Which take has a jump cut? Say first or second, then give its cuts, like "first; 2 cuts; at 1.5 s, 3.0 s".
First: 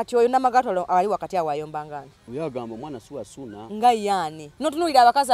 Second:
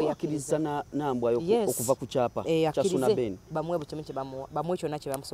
first; 3 cuts; at 2.2 s, 3.6 s, 4.4 s